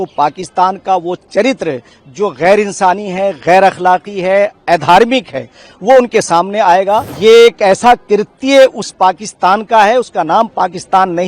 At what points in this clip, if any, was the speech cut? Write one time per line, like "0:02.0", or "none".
0:07.1